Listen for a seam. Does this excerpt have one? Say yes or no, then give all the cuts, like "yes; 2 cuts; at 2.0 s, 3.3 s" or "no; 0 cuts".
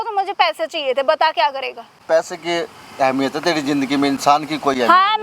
yes; 1 cut; at 2.0 s